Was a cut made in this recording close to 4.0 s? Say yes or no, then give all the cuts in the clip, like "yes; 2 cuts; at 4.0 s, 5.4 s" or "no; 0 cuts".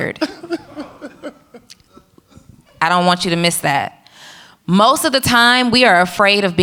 no; 0 cuts